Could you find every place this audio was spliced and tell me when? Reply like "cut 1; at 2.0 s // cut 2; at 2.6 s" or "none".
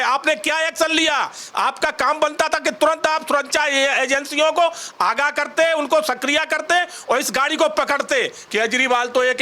cut 1; at 8.4 s